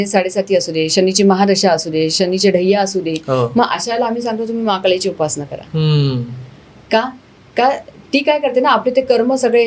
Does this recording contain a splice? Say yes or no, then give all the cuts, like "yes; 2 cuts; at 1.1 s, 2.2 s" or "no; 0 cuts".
no; 0 cuts